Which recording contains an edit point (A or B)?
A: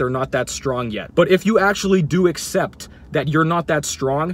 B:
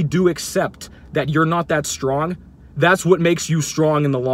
A